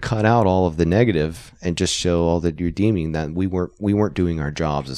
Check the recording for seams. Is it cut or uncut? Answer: uncut